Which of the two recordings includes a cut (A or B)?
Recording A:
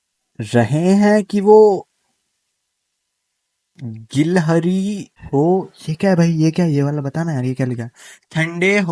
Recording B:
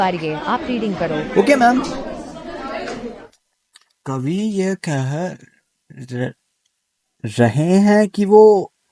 A